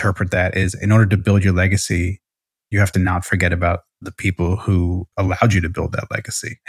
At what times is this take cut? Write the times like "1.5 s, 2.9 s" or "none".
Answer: 5.1 s